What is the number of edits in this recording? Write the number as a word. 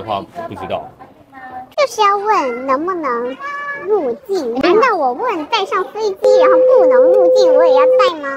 zero